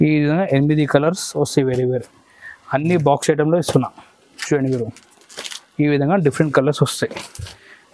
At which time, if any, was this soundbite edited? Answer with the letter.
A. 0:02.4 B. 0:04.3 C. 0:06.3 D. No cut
D